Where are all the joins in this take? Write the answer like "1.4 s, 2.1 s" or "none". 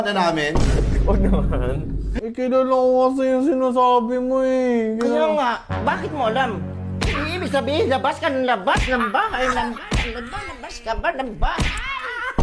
2.1 s